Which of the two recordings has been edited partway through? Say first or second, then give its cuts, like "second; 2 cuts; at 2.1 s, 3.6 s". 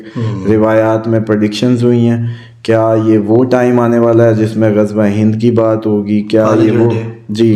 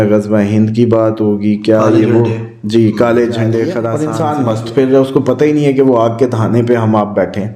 second; 1 cut; at 4.0 s